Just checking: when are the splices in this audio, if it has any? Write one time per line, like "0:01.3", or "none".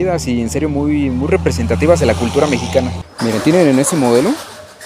0:03.0